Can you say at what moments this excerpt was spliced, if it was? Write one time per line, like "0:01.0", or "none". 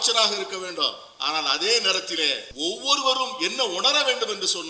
0:02.5